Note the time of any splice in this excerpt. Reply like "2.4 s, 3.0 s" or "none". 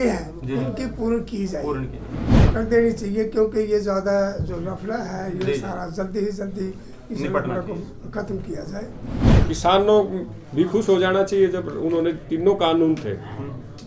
2.3 s, 9.5 s